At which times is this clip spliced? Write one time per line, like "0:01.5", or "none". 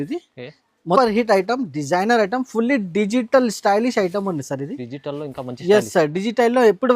0:01.0